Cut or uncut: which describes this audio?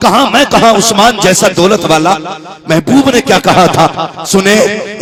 uncut